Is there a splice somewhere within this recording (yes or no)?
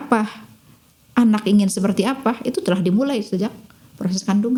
no